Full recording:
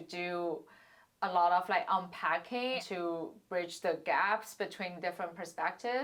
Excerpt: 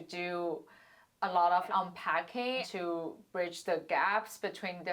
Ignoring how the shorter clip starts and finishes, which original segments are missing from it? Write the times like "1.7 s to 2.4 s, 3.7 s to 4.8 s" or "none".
1.7 s to 1.8 s